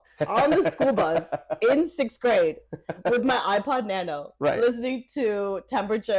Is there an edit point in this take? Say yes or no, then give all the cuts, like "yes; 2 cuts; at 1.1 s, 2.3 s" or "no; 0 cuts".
no; 0 cuts